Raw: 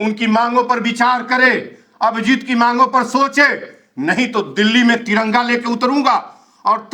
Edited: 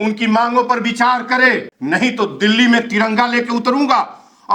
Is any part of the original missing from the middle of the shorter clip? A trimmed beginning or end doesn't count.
yes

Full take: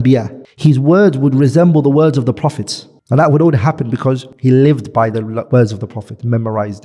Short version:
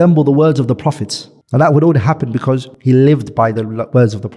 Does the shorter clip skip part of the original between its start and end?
no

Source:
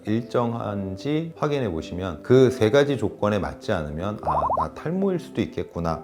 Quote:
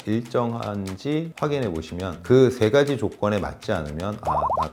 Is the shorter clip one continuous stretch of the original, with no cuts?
yes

